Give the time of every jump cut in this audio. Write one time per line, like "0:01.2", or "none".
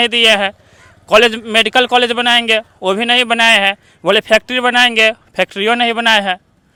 none